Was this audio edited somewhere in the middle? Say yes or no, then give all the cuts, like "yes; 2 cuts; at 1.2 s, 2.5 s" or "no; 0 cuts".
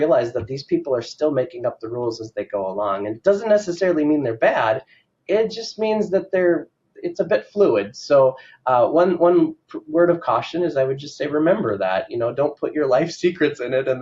no; 0 cuts